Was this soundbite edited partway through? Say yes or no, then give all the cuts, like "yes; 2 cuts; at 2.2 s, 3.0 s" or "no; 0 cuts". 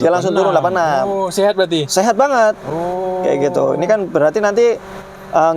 no; 0 cuts